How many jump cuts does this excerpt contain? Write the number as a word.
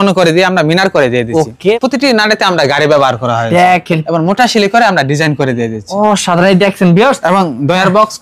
zero